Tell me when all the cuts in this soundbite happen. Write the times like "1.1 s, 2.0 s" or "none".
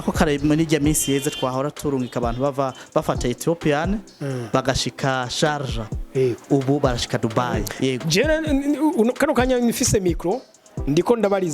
7.7 s